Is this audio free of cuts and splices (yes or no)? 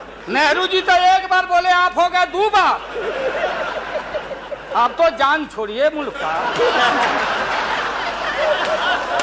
yes